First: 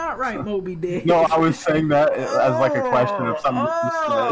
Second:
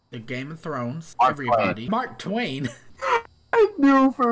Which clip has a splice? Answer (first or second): second